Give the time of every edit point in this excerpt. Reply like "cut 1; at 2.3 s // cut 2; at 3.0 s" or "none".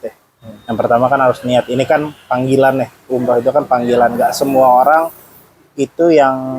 none